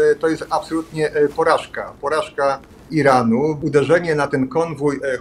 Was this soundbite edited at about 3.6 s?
yes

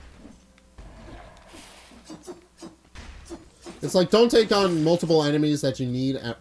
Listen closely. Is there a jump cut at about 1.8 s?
no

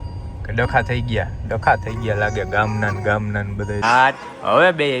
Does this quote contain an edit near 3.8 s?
yes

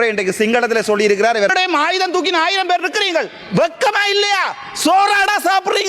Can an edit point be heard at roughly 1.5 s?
yes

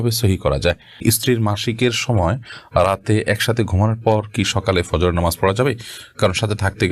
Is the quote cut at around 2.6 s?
no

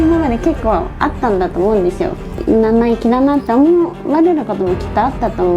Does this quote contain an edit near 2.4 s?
yes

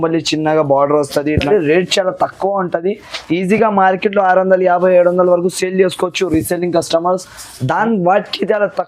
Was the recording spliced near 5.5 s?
no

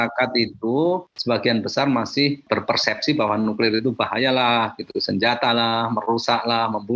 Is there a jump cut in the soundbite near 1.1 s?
yes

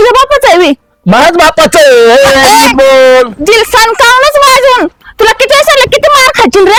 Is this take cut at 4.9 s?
no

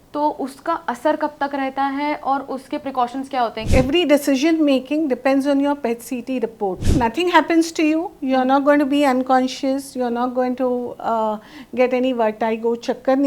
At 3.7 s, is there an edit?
yes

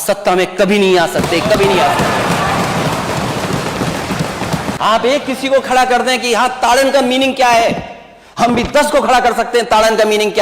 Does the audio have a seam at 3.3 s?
no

